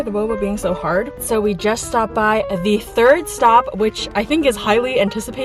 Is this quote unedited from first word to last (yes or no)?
no